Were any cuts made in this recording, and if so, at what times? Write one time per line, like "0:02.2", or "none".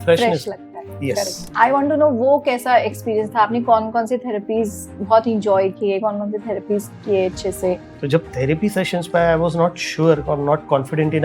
0:01.4
0:07.9